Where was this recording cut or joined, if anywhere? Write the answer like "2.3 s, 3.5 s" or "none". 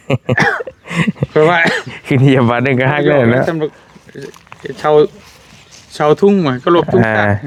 none

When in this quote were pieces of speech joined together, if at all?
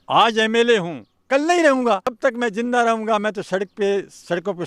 2.1 s

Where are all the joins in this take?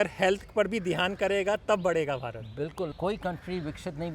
2.9 s

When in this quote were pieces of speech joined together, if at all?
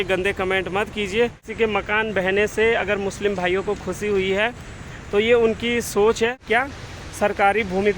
1.4 s, 6.4 s

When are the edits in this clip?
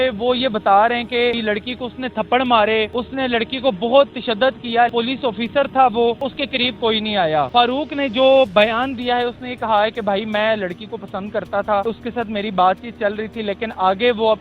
1.4 s, 3.0 s, 4.9 s, 6.4 s, 7.5 s, 11.8 s

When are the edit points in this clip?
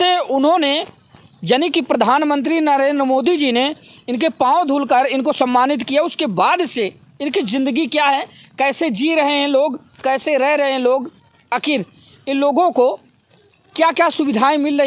none

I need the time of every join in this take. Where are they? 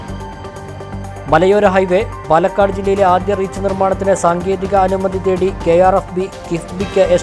1.1 s

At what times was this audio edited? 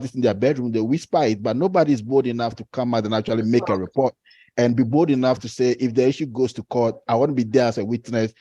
none

